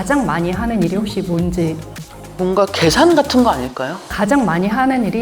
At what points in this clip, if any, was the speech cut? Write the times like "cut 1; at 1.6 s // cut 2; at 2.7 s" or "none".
cut 1; at 4.1 s